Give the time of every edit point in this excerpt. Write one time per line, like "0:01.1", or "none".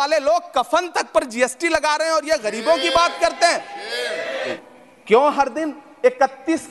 0:04.5